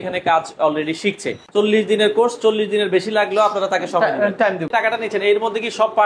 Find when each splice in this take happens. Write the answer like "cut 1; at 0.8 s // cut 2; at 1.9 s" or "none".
cut 1; at 1.4 s // cut 2; at 4.7 s